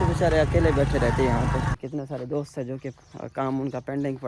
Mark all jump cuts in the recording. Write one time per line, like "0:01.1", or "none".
0:01.7